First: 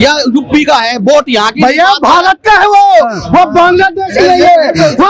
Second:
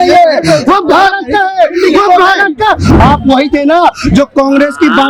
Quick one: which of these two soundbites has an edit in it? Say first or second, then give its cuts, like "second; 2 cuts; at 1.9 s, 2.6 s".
second; 1 cut; at 2.8 s